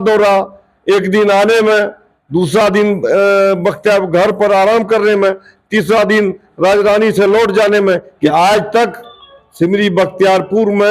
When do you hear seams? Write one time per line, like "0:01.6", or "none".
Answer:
0:08.1